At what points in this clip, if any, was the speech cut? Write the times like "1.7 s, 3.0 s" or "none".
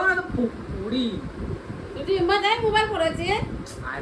none